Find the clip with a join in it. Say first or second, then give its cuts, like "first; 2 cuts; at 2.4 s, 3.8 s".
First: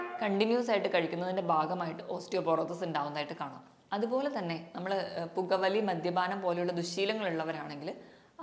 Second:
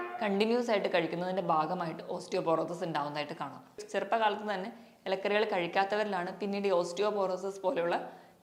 second; 1 cut; at 3.8 s